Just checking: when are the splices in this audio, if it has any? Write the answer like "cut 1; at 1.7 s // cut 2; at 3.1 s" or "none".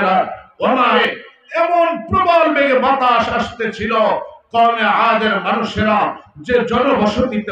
cut 1; at 1.0 s